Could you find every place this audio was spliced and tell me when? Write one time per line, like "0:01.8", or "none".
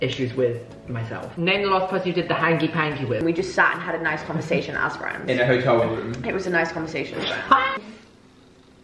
0:01.3
0:03.2
0:07.8